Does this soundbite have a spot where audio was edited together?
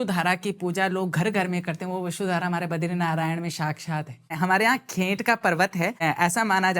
yes; 2 cuts; at 4.3 s, 6.0 s

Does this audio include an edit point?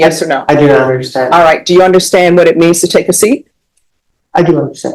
no; 0 cuts

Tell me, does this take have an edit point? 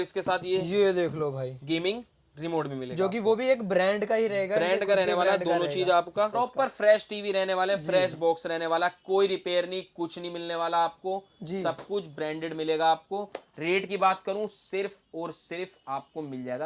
yes; 1 cut; at 6.3 s

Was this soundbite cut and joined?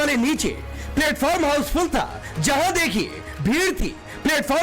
yes; 1 cut; at 1.7 s

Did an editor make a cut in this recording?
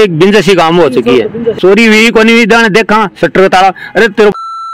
yes; 1 cut; at 1.6 s

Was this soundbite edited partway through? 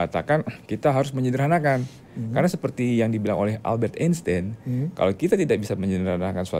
no; 0 cuts

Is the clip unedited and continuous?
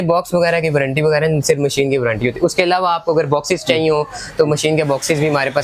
yes; 0 cuts

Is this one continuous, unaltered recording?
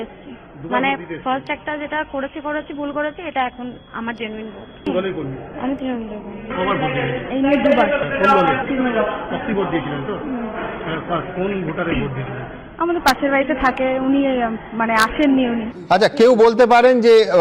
yes; 0 cuts

